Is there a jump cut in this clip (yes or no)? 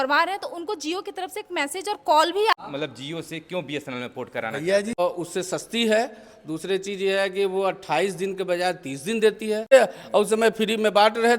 yes